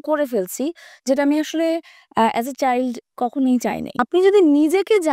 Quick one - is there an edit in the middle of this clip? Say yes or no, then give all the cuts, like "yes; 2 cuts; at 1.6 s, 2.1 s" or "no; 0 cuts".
yes; 1 cut; at 3.9 s